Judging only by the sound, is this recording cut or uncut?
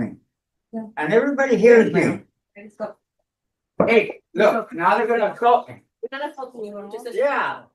uncut